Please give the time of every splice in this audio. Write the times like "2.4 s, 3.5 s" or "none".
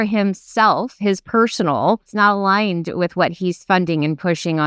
2.1 s